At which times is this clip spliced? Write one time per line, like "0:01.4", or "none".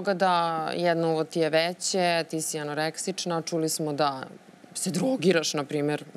none